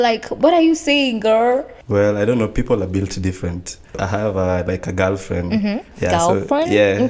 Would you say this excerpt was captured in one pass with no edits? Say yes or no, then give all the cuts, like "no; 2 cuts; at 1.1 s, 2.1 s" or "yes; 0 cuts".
no; 3 cuts; at 1.8 s, 4.0 s, 5.9 s